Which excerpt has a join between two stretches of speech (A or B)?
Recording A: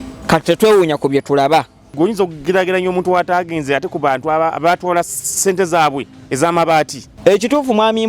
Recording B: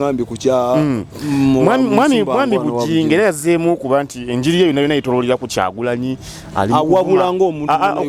A